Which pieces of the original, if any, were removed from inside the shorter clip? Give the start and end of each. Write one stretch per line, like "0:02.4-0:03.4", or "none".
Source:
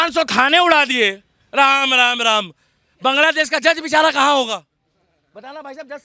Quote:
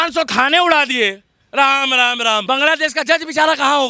0:02.4-0:03.0